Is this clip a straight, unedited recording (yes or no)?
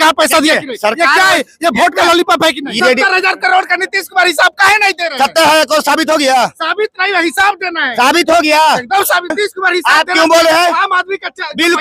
no